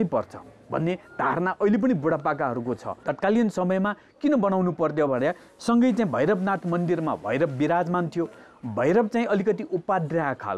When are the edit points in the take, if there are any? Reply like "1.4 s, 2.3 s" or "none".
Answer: 3.0 s